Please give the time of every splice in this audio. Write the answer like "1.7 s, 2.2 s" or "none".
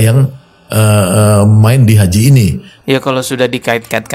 2.8 s